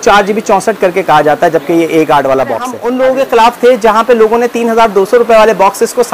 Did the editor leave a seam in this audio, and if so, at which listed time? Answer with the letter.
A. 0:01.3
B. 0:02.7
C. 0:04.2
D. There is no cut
B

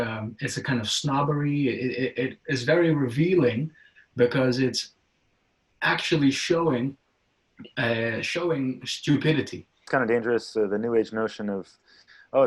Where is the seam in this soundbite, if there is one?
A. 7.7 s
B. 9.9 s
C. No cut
B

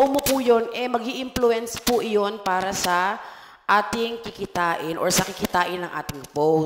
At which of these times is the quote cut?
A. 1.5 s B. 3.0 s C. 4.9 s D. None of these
D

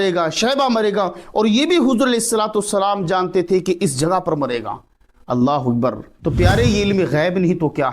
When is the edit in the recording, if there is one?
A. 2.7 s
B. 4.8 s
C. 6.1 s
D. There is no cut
C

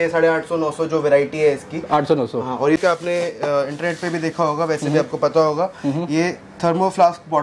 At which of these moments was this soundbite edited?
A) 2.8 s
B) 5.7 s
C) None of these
A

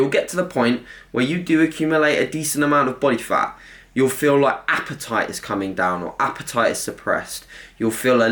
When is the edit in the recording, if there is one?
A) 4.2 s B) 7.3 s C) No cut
C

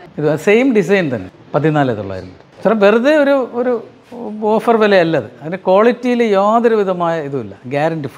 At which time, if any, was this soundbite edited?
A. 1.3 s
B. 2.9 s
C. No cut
A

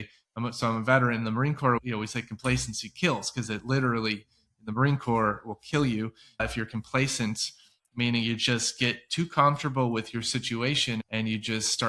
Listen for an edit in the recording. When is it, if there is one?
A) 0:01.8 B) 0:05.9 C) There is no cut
A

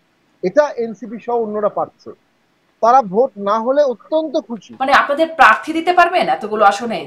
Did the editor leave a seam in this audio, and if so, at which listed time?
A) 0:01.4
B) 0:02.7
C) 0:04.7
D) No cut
C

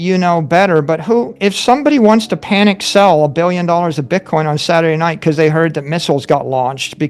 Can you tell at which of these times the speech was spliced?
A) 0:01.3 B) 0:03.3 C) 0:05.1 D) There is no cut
A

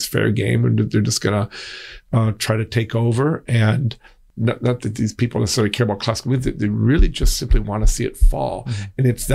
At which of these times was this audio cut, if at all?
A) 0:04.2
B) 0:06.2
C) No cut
A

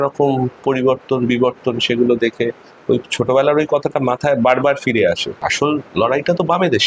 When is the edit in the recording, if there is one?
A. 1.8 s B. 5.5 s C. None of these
B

